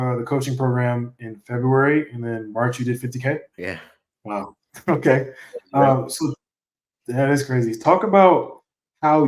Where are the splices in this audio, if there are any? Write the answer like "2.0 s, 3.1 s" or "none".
none